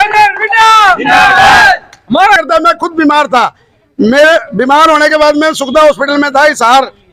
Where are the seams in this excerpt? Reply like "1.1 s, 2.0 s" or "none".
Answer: none